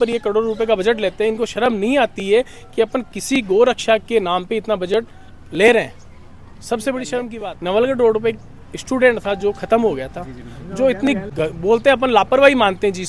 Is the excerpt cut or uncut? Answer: cut